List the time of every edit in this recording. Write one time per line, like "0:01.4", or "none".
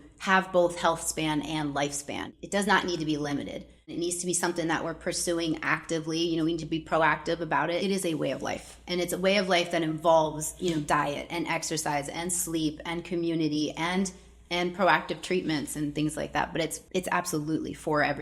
0:02.3
0:03.9
0:07.8
0:16.8